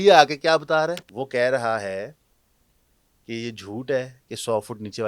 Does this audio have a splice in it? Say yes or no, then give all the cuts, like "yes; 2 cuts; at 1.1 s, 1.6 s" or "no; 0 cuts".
yes; 1 cut; at 1.1 s